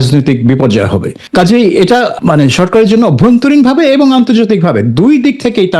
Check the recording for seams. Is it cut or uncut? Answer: cut